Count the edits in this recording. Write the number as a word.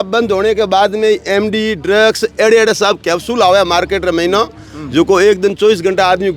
zero